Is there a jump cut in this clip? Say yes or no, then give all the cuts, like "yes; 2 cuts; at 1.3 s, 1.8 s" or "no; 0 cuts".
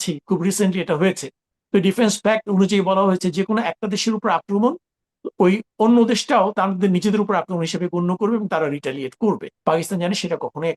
yes; 1 cut; at 9.5 s